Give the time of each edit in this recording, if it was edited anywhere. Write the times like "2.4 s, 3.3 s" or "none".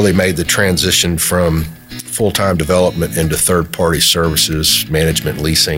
none